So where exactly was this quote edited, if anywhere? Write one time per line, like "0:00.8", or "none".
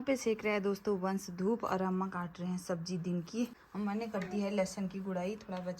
0:03.6